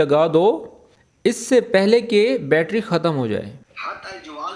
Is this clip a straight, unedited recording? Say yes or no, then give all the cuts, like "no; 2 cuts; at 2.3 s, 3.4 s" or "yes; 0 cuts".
no; 2 cuts; at 1.4 s, 3.7 s